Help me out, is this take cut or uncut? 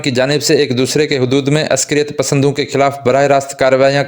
uncut